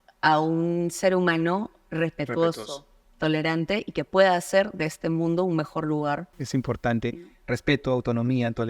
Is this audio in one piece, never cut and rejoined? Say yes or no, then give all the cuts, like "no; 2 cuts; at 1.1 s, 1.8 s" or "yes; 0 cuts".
no; 1 cut; at 6.3 s